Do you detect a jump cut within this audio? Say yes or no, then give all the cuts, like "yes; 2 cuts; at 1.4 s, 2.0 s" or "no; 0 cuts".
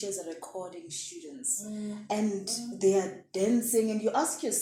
no; 0 cuts